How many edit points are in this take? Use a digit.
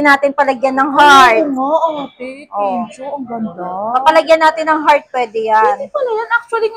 0